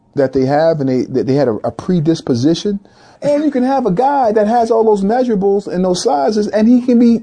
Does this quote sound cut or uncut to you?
cut